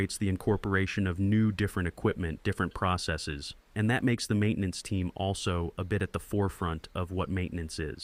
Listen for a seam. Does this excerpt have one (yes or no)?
no